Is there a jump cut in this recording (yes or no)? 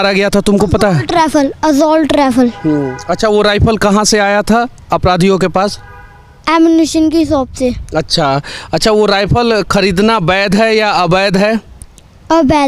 no